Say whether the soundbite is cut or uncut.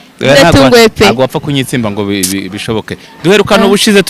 uncut